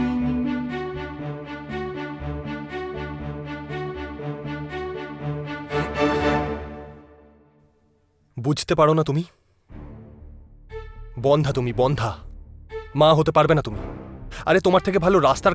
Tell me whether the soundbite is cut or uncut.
uncut